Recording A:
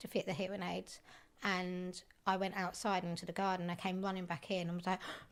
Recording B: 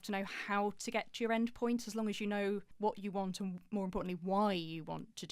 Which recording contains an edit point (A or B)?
B